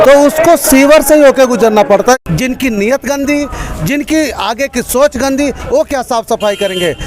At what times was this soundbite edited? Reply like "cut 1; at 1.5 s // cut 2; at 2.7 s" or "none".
cut 1; at 2.2 s